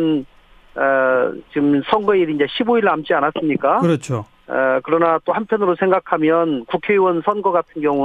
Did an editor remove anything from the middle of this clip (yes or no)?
yes